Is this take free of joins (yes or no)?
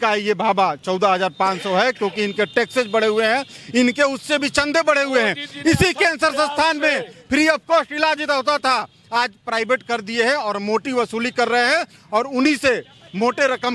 yes